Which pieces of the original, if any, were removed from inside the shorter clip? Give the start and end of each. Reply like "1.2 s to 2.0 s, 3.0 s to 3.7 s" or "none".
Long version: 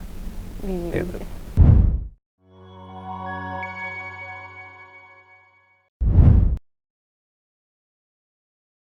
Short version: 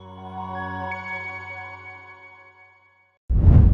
none